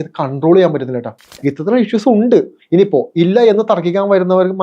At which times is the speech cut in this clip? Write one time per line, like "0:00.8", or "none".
0:01.2